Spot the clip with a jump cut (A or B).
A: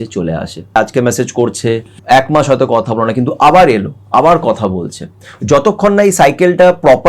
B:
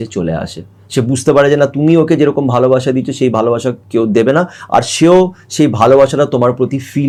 A